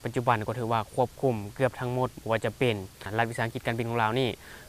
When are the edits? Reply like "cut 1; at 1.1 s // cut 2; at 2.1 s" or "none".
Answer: cut 1; at 3.0 s